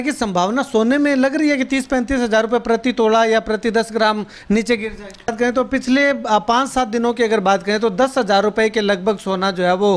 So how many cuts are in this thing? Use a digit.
1